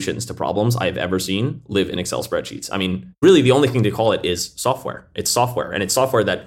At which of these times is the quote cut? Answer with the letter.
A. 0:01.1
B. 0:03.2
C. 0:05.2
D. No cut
B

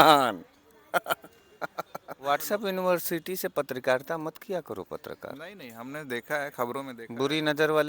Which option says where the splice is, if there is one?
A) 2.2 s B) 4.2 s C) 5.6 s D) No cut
A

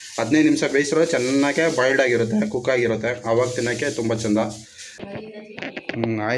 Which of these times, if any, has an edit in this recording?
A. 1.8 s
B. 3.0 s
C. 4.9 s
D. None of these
C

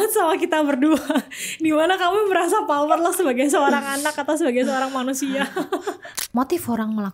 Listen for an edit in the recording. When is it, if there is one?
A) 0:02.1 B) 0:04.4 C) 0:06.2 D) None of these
C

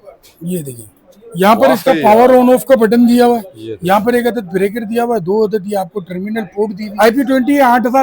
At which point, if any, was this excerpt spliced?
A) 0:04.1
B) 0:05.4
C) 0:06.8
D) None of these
C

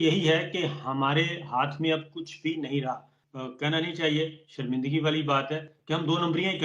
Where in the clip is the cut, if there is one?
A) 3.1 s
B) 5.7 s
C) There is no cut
A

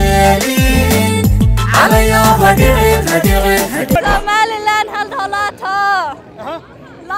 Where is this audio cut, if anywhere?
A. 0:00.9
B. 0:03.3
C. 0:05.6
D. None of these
D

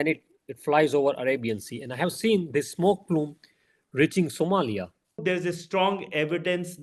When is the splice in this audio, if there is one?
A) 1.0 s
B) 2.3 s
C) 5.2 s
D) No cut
C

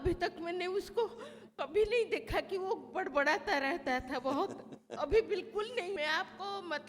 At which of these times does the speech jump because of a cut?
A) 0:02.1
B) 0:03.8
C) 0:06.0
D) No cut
C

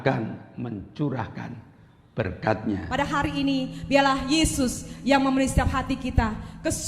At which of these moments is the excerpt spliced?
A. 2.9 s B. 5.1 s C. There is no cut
A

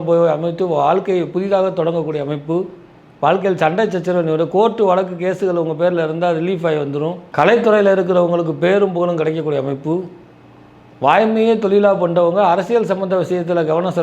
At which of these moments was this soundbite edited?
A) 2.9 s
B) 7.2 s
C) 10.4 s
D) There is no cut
B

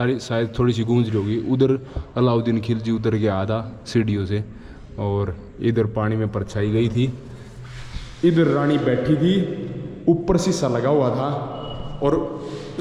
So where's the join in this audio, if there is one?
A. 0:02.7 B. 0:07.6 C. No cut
C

